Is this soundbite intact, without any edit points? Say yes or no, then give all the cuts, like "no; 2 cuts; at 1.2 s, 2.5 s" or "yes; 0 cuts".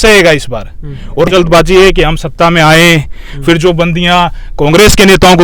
no; 1 cut; at 1.3 s